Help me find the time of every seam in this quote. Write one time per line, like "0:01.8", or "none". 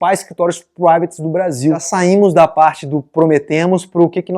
0:01.9